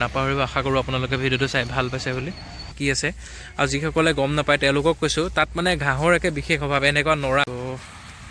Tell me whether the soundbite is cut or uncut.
cut